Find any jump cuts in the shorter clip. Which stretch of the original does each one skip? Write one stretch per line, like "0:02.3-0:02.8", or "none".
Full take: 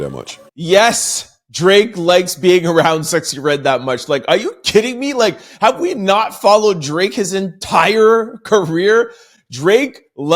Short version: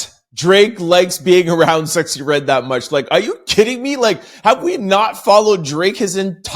none